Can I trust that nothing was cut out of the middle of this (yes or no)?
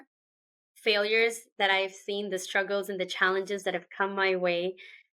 yes